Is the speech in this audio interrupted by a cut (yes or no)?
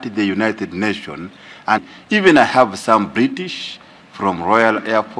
yes